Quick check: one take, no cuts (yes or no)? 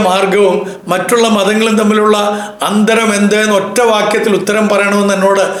yes